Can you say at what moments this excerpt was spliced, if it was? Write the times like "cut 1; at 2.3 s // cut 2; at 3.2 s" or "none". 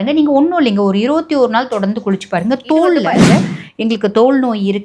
cut 1; at 3.2 s